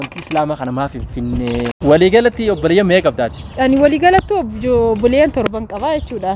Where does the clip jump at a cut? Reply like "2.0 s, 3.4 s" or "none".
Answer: 1.7 s